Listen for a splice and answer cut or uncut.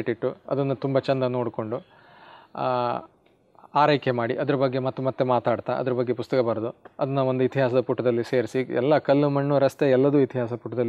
uncut